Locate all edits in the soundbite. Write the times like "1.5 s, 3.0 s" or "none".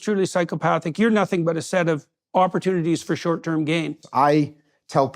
4.0 s